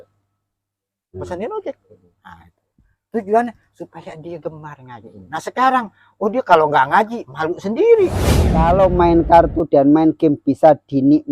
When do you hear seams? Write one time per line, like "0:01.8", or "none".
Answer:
0:08.6